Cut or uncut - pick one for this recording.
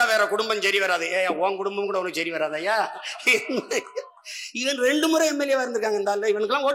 uncut